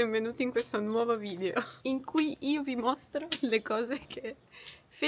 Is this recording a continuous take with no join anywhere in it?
no; 1 cut; at 1.7 s

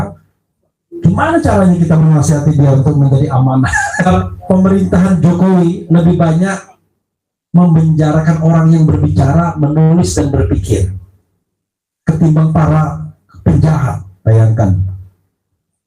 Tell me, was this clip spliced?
yes; 1 cut; at 4.1 s

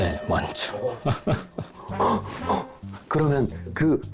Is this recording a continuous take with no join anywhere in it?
yes; 0 cuts

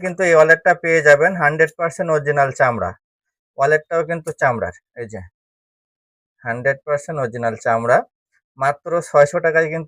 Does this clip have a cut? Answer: no; 0 cuts

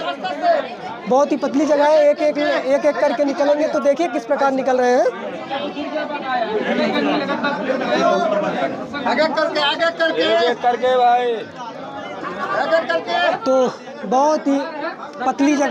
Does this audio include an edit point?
no; 0 cuts

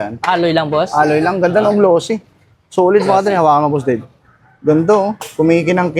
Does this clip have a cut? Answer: no; 0 cuts

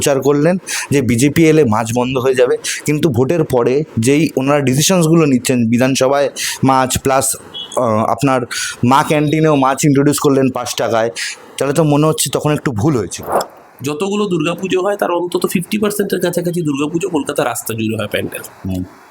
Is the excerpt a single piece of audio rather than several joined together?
no; 1 cut; at 13.4 s

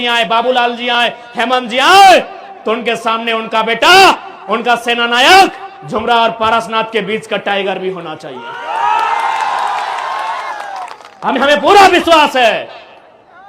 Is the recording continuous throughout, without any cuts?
yes; 0 cuts

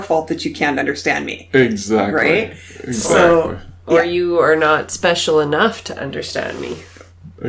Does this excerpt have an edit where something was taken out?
no; 0 cuts

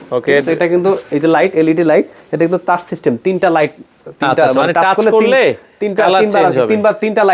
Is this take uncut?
yes; 0 cuts

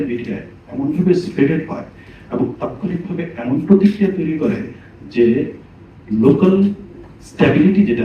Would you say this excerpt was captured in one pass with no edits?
yes; 0 cuts

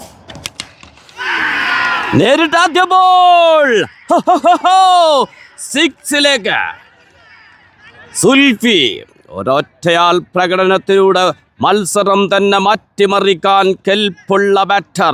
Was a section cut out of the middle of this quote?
no; 0 cuts

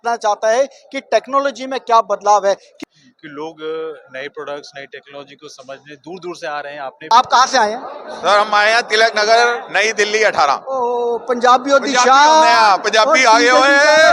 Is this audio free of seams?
no; 2 cuts; at 2.7 s, 7.0 s

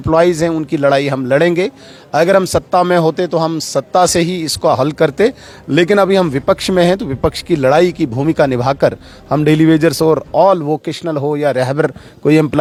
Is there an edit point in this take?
no; 0 cuts

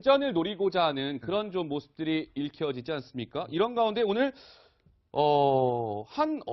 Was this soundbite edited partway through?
no; 0 cuts

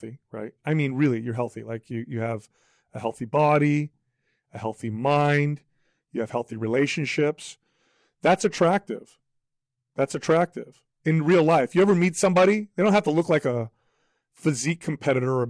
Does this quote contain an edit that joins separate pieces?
no; 0 cuts

